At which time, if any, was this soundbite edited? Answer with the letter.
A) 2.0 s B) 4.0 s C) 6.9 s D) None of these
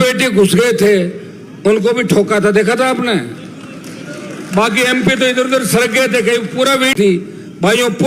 C